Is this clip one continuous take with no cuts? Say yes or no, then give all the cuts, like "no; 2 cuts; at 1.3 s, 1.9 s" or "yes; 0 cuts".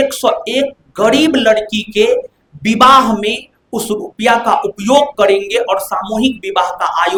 yes; 0 cuts